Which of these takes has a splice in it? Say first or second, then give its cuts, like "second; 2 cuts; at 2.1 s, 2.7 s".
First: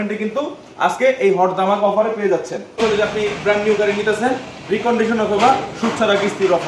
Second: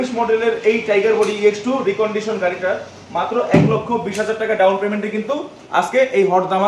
first; 1 cut; at 2.8 s